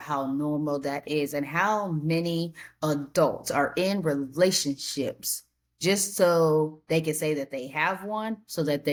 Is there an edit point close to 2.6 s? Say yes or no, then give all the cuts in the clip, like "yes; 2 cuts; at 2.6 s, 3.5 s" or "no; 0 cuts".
no; 0 cuts